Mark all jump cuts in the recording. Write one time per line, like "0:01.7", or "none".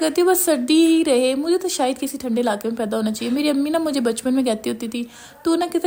none